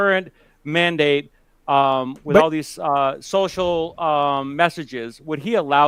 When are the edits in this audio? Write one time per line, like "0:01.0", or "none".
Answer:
none